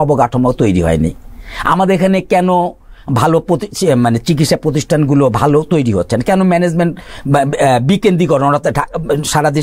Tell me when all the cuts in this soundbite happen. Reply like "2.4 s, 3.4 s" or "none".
none

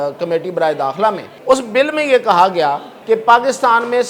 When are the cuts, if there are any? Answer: 1.3 s, 2.9 s

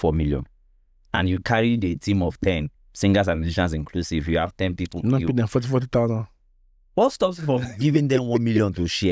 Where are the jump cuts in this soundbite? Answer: none

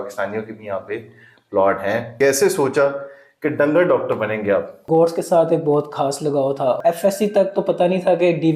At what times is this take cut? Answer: 2.1 s, 4.8 s, 6.8 s

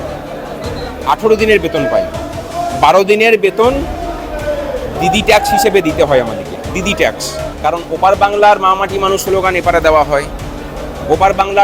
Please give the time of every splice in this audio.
7.5 s

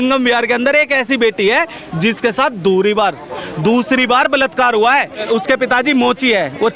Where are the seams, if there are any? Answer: 5.2 s

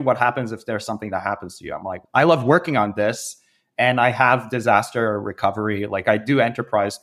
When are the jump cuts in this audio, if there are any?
2.0 s

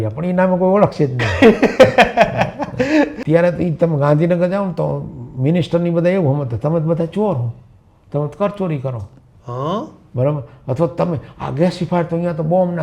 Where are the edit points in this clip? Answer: 3.2 s

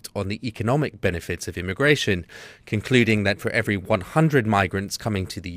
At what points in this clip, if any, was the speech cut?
2.0 s

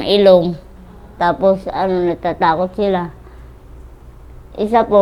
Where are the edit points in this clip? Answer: none

